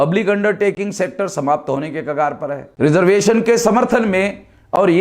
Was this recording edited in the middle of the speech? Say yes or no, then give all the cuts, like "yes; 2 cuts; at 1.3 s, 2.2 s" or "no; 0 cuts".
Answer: yes; 1 cut; at 2.7 s